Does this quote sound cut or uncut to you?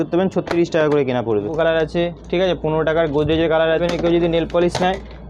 cut